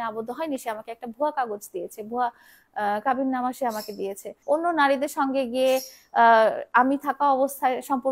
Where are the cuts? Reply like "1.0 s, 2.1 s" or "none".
4.3 s